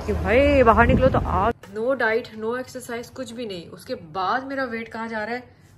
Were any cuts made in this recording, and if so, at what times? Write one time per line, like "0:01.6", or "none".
0:01.6